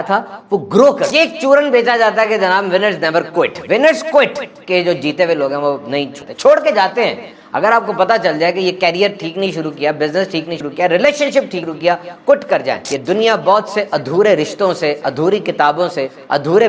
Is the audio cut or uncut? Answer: cut